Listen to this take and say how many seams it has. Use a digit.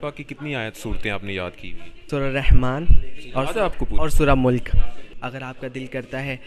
2